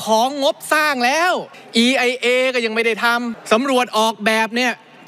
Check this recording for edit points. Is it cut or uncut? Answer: cut